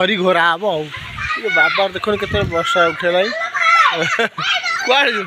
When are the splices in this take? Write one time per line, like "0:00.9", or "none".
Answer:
none